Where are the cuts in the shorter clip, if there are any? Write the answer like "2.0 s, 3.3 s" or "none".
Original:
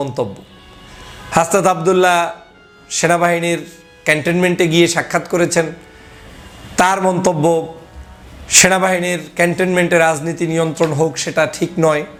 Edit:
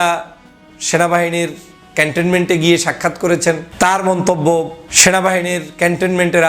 3.7 s, 4.8 s